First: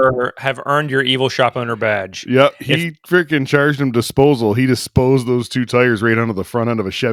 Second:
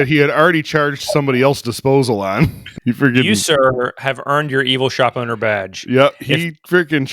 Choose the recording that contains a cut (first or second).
second